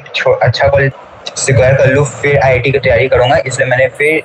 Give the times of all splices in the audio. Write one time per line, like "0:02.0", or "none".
0:01.0